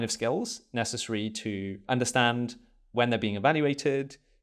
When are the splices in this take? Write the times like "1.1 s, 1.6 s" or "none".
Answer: 1.8 s